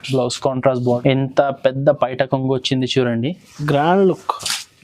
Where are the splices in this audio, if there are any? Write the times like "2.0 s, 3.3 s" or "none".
1.0 s